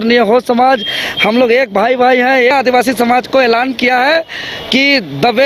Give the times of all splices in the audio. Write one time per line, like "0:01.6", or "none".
0:02.5